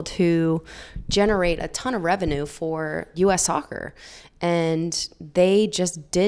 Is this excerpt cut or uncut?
cut